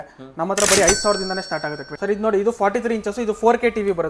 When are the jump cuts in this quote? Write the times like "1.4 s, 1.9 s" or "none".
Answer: 1.9 s